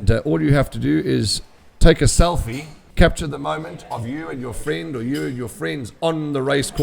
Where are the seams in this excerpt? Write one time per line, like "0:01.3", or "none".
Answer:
0:02.8

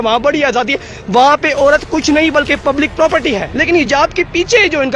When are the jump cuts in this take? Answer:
0:03.6

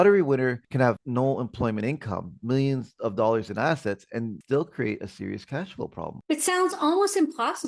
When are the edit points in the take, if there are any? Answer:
none

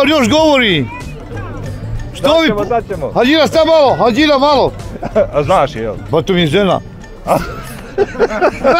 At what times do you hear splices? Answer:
none

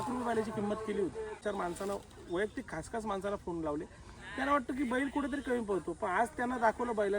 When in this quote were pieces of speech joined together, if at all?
0:01.4

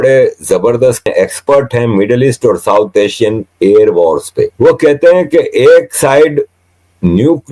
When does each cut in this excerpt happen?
0:01.1
0:04.5

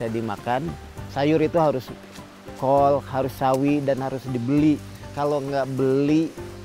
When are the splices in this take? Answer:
0:01.0
0:05.1

